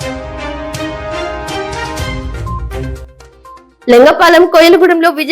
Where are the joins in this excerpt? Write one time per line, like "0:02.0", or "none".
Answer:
0:03.6